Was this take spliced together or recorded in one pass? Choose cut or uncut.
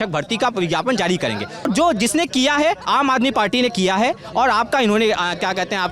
cut